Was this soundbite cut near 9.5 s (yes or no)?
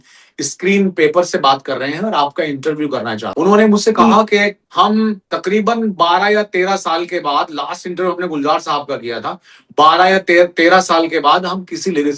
no